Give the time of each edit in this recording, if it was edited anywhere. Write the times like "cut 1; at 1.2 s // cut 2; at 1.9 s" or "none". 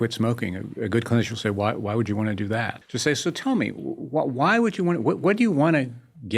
cut 1; at 2.8 s

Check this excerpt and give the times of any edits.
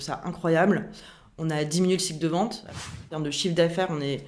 cut 1; at 3.1 s

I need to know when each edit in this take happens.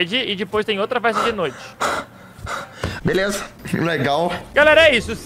cut 1; at 2.9 s // cut 2; at 4.5 s

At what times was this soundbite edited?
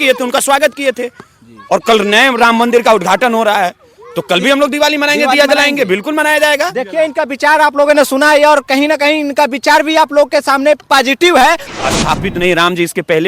cut 1; at 11.7 s

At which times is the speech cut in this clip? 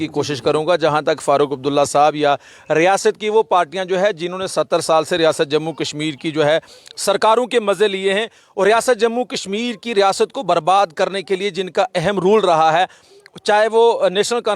none

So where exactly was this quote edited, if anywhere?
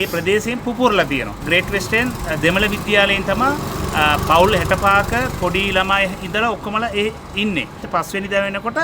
cut 1; at 1.4 s // cut 2; at 7.8 s

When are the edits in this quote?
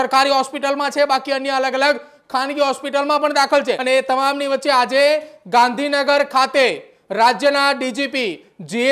cut 1; at 3.8 s

